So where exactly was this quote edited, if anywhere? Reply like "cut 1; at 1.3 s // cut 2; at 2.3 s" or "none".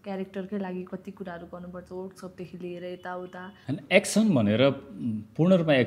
cut 1; at 3.5 s